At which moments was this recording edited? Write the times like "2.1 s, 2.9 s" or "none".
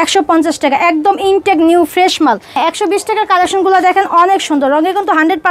2.6 s

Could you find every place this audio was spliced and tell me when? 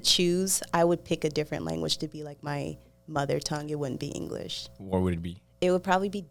none

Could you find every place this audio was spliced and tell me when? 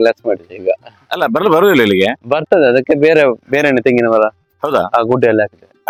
none

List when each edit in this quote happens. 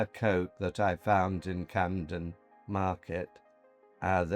none

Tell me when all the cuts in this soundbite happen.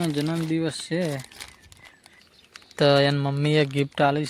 2.2 s

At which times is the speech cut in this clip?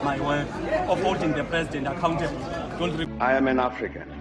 3.0 s

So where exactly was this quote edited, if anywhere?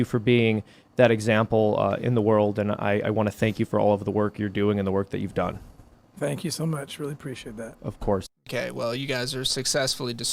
8.4 s

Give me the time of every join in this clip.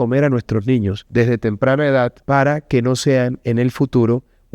1.0 s, 2.2 s

